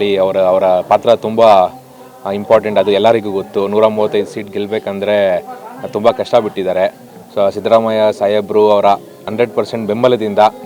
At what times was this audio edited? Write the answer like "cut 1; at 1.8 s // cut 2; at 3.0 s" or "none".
cut 1; at 9.3 s